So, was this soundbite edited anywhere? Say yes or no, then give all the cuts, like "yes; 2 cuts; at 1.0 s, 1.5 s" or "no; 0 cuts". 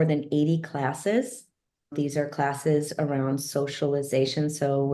yes; 1 cut; at 1.9 s